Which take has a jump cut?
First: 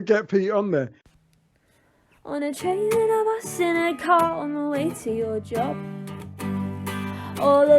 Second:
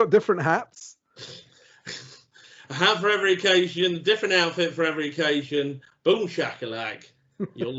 first; 1 cut; at 1.0 s

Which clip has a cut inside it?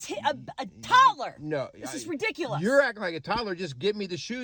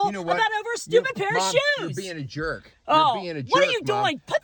second; 1 cut; at 3.3 s

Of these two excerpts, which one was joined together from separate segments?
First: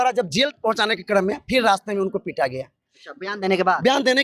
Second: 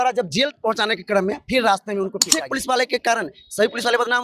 second; 1 cut; at 2.4 s

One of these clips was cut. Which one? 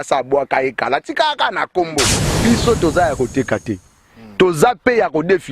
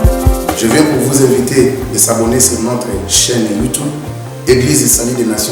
first; 1 cut; at 2.2 s

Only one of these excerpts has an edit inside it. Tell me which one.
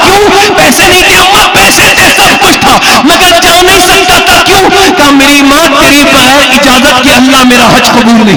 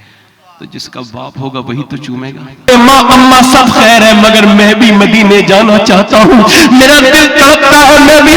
second; 1 cut; at 2.7 s

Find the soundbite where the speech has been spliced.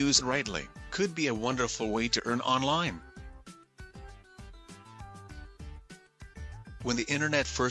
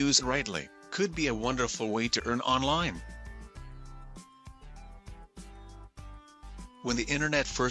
second; 2 cuts; at 3.0 s, 6.4 s

